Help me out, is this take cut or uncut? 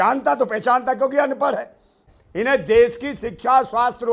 cut